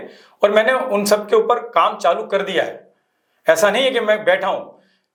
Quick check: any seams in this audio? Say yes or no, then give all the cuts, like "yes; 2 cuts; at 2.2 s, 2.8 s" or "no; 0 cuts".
no; 0 cuts